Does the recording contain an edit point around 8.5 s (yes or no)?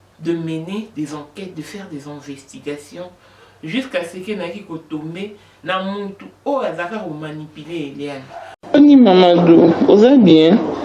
yes